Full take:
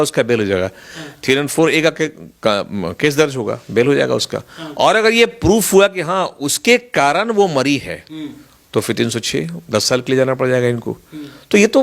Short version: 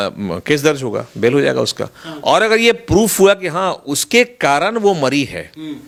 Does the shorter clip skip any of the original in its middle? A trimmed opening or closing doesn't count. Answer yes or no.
no